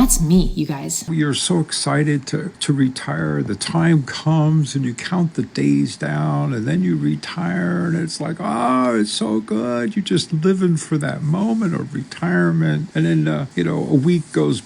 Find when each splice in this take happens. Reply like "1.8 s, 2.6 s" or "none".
1.1 s, 2.5 s, 13.5 s